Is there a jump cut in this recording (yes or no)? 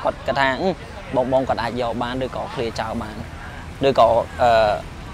no